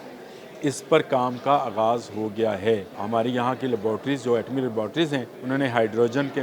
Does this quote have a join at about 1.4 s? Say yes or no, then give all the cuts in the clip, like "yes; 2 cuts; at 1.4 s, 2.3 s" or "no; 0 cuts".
no; 2 cuts; at 2.9 s, 5.3 s